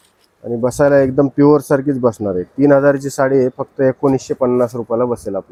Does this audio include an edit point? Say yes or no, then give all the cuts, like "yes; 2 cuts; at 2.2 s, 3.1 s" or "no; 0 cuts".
no; 0 cuts